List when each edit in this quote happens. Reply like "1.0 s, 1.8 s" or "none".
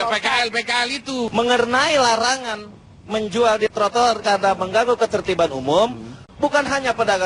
1.3 s